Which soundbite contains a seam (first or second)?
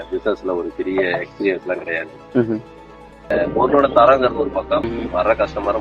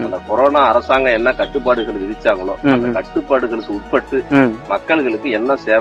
first